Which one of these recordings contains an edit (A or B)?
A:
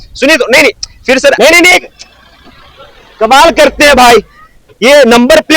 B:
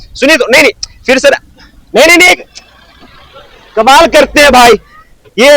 A